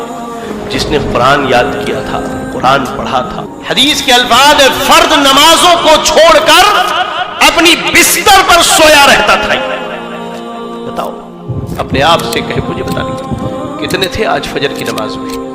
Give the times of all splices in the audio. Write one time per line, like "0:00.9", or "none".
0:03.5